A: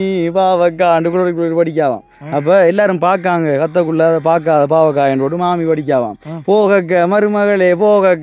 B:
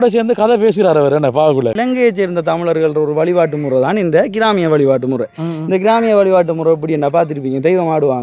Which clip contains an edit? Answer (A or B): B